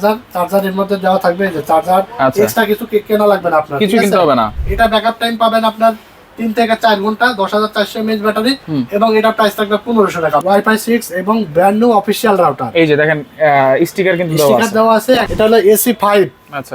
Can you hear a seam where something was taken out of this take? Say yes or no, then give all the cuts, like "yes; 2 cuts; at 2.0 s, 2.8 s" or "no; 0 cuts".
yes; 3 cuts; at 4.6 s, 10.4 s, 15.3 s